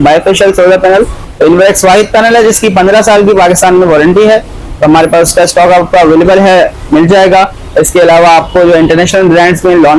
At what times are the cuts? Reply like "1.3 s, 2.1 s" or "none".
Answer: 1.2 s

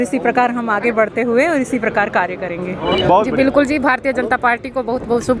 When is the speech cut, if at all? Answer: 3.0 s

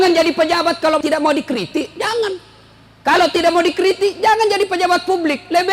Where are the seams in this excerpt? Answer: 1.0 s

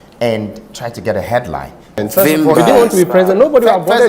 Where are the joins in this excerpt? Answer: 2.0 s

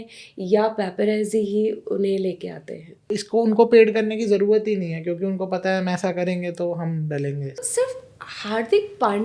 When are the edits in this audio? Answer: 2.9 s, 7.6 s

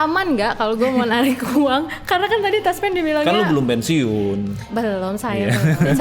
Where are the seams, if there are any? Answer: none

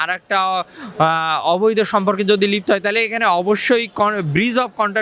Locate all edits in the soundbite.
none

